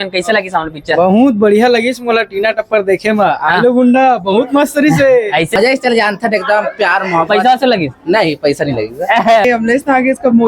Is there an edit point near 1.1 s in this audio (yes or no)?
no